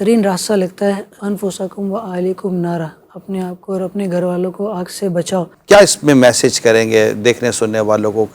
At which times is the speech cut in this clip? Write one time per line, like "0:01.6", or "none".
0:01.1
0:05.5